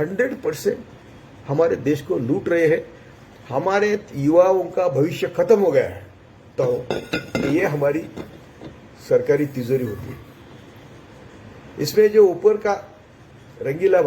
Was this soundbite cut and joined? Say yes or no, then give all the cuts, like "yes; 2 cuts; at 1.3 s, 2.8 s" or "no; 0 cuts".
yes; 1 cut; at 6.5 s